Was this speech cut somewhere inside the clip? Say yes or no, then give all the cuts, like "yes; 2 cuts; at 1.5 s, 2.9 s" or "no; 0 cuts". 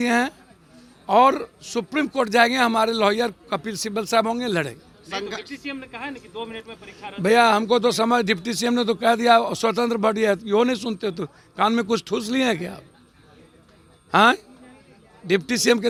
no; 0 cuts